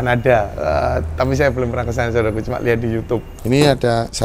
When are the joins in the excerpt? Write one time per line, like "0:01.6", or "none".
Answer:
0:03.3